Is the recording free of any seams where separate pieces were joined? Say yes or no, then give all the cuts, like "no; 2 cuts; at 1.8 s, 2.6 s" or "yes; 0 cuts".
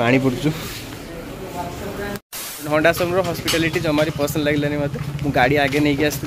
no; 1 cut; at 2.6 s